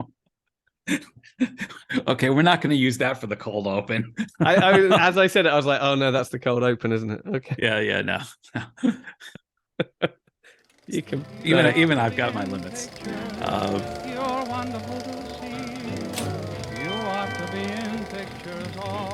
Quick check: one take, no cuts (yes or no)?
no